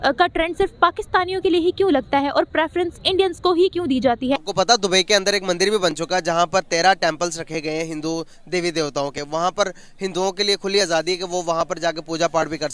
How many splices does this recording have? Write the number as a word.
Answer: one